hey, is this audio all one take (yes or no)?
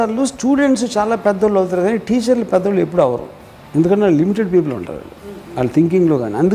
yes